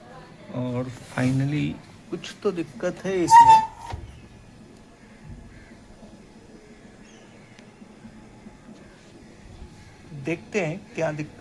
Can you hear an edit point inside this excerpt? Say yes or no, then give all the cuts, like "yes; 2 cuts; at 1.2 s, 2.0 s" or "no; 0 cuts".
yes; 1 cut; at 1.9 s